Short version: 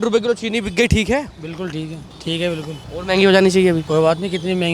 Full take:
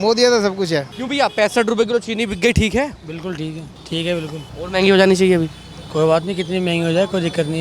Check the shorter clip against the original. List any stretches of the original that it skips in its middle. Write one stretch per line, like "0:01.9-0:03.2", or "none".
0:05.5-0:05.9

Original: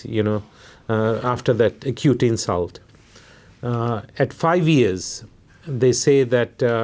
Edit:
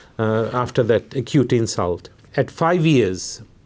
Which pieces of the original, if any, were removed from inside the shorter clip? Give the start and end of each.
0:02.9-0:04.1

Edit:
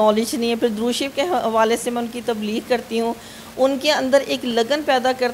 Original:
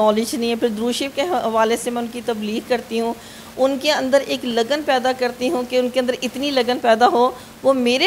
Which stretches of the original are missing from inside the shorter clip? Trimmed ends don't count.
none

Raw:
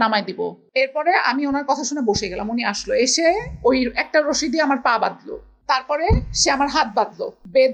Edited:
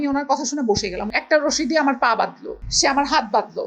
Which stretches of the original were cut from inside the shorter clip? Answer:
0:02.5-0:03.9
0:05.5-0:06.3

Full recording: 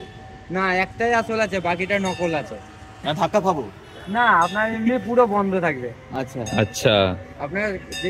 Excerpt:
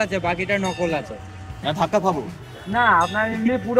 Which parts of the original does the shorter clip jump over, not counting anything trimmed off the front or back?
none

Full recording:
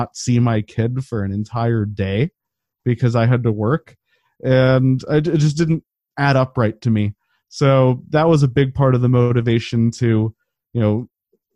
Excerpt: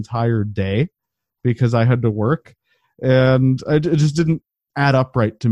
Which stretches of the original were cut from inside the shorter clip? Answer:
none

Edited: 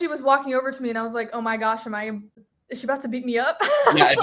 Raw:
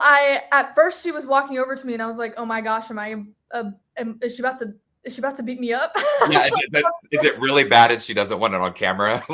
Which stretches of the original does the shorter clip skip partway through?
0:03.4-0:04.8

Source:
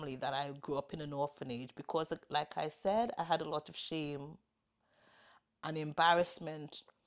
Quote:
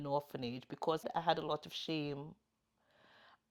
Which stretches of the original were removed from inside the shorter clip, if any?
0:02.1-0:03.1

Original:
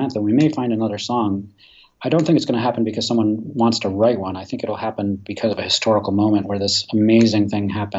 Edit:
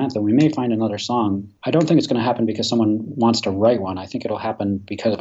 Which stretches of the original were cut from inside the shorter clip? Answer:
0:01.5-0:01.9

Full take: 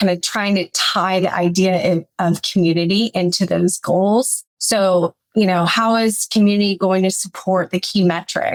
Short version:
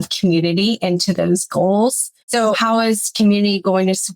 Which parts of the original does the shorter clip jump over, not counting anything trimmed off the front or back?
0:04.8-0:05.6

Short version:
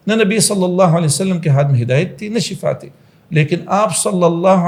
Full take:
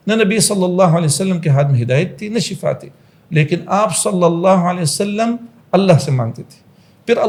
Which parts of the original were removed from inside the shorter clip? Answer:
none

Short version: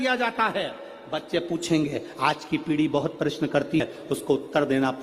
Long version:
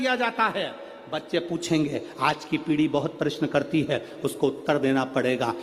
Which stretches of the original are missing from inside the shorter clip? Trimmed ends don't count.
0:03.8-0:03.9

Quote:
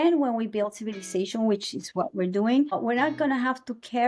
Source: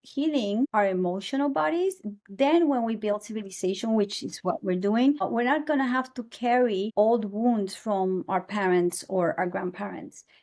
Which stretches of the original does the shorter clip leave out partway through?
none

